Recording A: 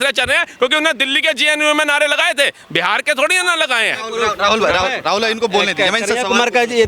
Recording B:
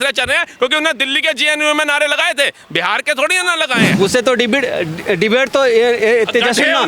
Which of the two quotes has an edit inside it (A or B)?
B